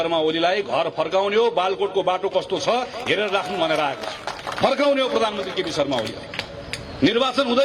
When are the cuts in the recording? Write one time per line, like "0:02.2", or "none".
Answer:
none